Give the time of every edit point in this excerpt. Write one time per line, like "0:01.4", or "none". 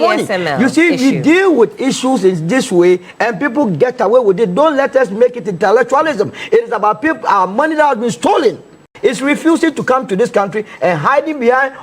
0:08.9